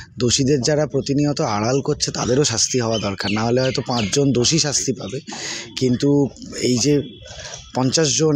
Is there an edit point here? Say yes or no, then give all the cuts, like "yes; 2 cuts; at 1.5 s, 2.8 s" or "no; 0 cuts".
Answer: no; 0 cuts